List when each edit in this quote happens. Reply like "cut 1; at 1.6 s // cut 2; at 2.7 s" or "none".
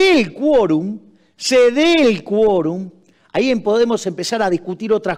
none